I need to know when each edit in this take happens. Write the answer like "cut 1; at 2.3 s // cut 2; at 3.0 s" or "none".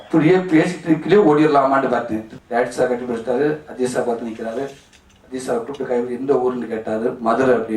cut 1; at 2.2 s